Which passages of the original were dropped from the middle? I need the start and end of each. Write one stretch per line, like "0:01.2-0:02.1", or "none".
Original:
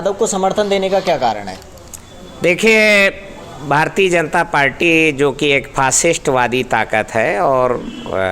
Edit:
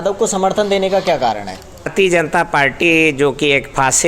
0:01.9-0:03.9